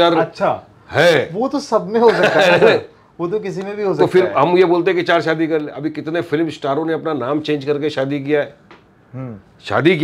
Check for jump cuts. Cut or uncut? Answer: uncut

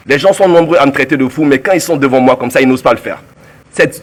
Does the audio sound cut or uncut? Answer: uncut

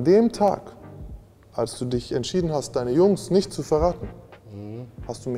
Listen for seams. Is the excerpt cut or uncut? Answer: uncut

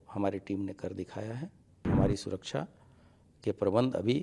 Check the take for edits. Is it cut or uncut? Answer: cut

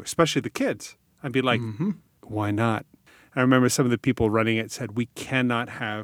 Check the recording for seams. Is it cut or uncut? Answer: cut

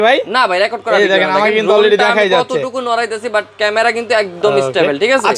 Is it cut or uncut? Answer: uncut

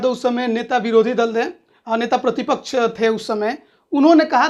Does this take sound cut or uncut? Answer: uncut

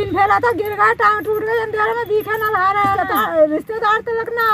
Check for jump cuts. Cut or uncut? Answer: cut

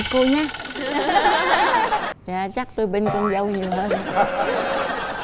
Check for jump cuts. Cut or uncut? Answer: cut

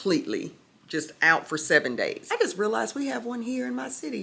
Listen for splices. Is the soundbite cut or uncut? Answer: cut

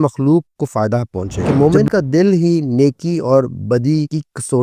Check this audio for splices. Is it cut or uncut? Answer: cut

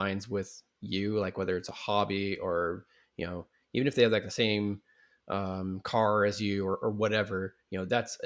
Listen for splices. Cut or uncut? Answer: uncut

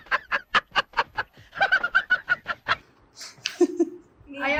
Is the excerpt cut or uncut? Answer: uncut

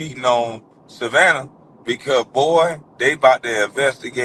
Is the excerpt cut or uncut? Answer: uncut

